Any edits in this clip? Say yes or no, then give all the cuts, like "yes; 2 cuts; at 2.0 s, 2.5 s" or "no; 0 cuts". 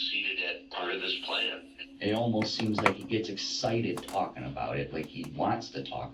yes; 1 cut; at 1.8 s